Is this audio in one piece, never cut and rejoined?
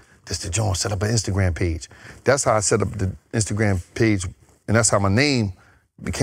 yes; 0 cuts

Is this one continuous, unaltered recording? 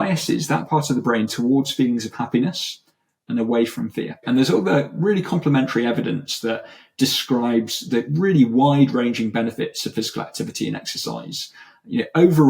no; 1 cut; at 4.2 s

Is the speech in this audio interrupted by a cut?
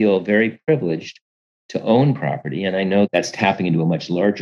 yes; 1 cut; at 3.1 s

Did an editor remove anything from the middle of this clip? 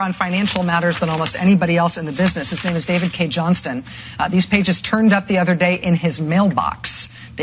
no; 0 cuts

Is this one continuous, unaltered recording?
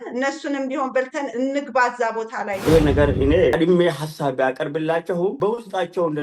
no; 3 cuts; at 2.6 s, 3.5 s, 5.4 s

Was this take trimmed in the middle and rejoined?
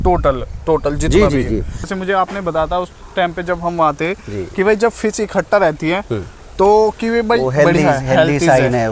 yes; 1 cut; at 1.8 s

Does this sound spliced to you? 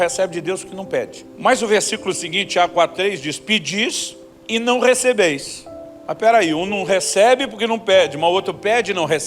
yes; 1 cut; at 1.2 s

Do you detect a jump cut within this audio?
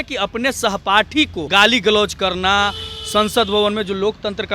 yes; 1 cut; at 1.4 s

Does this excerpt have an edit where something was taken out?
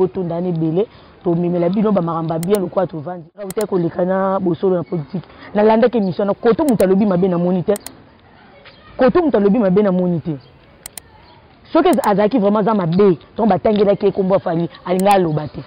yes; 1 cut; at 3.5 s

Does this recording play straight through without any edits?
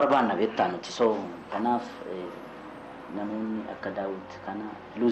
yes; 0 cuts

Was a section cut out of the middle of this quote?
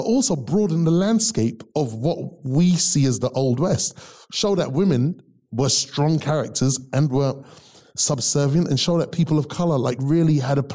yes; 1 cut; at 7.4 s

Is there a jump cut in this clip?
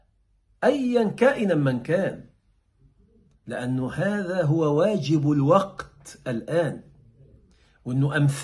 no; 0 cuts

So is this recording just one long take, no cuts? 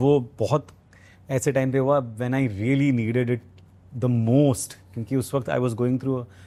yes; 0 cuts

